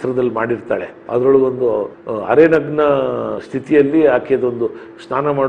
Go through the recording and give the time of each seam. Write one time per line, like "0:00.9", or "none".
0:00.9